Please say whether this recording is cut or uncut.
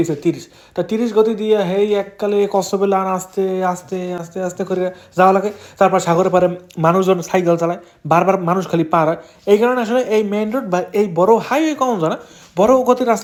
uncut